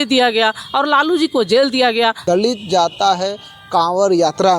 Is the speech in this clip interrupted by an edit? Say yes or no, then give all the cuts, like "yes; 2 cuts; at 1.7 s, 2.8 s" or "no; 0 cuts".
yes; 1 cut; at 2.2 s